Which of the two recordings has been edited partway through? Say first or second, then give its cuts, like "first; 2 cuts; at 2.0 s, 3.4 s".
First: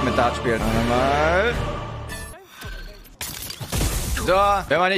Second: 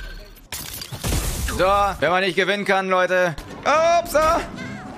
second; 1 cut; at 3.3 s